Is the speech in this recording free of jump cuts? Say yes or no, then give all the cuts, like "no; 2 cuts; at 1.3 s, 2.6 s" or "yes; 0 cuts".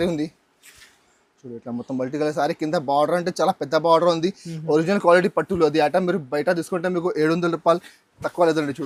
yes; 0 cuts